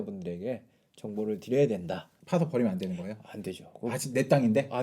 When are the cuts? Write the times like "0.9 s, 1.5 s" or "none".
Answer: 2.2 s